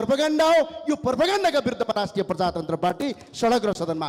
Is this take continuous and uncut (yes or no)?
yes